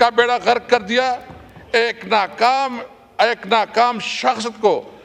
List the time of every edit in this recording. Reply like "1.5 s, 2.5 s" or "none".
none